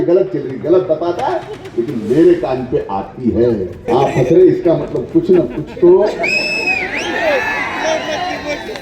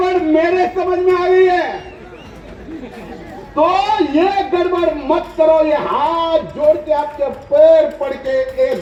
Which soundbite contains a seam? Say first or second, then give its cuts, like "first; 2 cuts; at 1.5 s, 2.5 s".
first; 1 cut; at 3.8 s